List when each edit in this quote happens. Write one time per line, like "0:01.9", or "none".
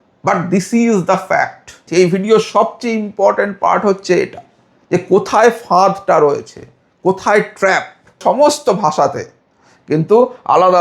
0:01.8
0:08.2